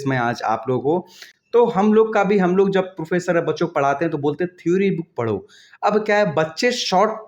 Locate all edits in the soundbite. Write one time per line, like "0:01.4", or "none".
none